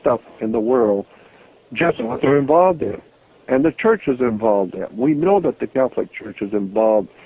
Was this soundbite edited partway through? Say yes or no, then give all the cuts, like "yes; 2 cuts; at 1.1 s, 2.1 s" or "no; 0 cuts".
no; 0 cuts